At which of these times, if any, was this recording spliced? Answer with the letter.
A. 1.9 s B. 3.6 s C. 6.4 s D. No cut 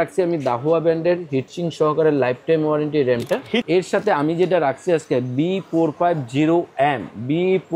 B